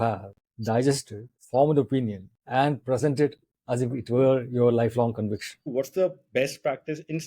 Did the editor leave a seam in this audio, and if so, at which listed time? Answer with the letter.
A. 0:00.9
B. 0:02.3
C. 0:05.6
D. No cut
C